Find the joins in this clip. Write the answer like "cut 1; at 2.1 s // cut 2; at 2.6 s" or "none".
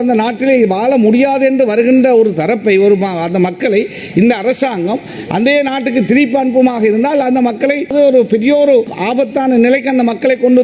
cut 1; at 7.9 s // cut 2; at 9.0 s